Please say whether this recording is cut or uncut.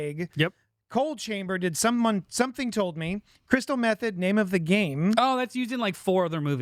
uncut